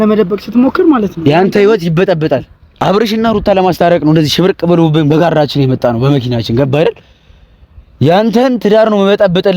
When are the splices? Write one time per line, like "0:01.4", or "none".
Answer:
0:02.8